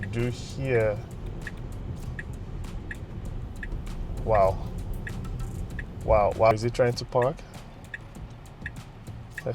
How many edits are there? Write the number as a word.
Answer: one